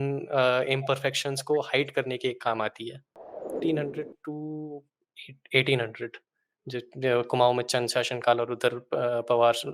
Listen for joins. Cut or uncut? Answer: cut